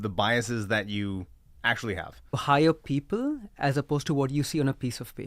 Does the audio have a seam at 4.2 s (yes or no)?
no